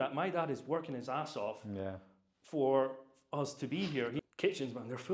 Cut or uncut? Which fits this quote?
cut